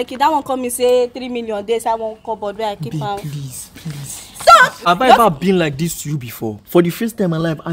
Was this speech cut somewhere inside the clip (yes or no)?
yes